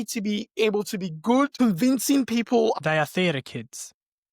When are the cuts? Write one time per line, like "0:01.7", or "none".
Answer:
0:01.5
0:02.8